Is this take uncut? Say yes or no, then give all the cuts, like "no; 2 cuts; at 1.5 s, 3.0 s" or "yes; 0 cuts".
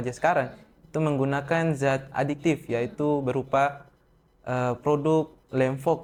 yes; 0 cuts